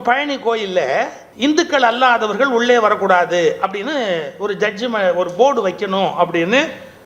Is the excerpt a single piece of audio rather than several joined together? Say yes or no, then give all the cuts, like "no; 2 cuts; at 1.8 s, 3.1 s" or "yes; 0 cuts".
no; 1 cut; at 1.2 s